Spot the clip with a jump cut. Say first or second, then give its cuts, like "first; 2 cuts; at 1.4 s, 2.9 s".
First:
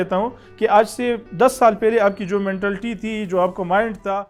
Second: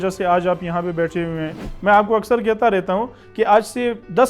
second; 1 cut; at 1.6 s